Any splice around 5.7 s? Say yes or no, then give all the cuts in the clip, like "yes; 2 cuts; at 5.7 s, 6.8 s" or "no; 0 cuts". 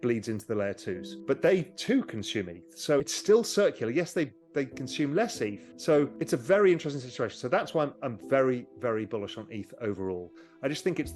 yes; 2 cuts; at 3.1 s, 5.7 s